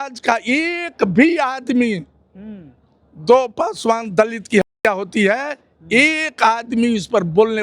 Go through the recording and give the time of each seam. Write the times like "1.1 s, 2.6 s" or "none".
none

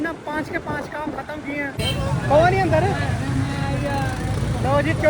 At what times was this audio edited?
1.7 s

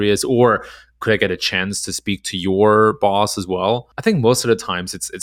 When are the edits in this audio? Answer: 3.9 s

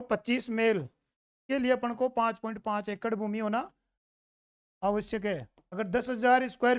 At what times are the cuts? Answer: 5.6 s

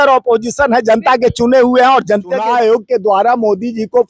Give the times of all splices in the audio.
2.4 s

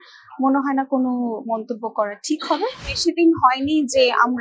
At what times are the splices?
3.0 s

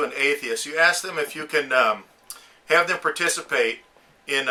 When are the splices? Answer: none

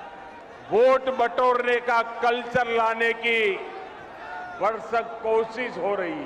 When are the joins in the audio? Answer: none

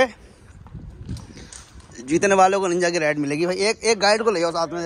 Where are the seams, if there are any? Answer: none

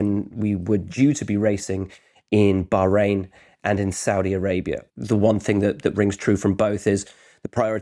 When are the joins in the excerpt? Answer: 4.9 s

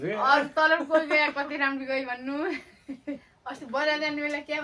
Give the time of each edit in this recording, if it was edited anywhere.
3.4 s

